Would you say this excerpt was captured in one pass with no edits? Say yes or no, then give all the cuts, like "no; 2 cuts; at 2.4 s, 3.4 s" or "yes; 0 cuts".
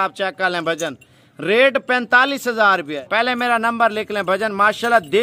no; 1 cut; at 2.9 s